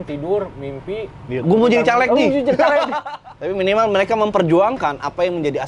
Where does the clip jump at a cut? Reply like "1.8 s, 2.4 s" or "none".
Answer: 3.0 s